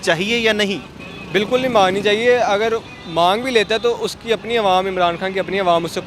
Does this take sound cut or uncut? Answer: uncut